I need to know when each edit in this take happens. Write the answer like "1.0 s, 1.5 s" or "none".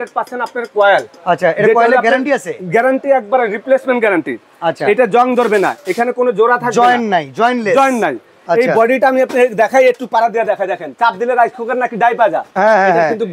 none